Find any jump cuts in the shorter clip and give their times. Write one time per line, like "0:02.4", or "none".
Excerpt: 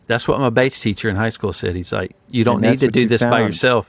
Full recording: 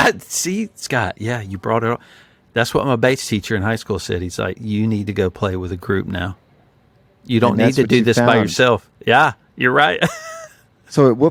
0:02.1